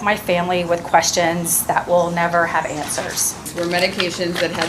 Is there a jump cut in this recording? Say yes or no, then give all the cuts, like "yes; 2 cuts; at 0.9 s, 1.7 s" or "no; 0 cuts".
yes; 1 cut; at 3.5 s